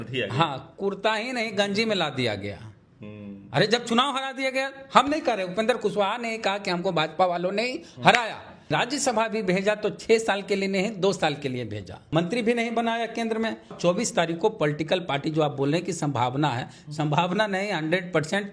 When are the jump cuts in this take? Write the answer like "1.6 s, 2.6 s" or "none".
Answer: 8.7 s, 12.0 s, 13.7 s